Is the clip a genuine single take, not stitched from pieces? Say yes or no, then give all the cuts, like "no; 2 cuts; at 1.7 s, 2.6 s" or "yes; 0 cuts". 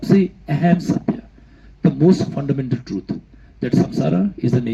yes; 0 cuts